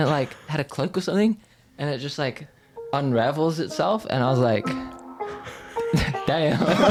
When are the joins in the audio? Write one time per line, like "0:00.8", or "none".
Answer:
none